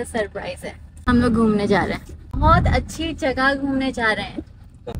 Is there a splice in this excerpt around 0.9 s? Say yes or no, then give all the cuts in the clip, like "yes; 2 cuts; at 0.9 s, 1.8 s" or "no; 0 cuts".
yes; 2 cuts; at 0.9 s, 2.4 s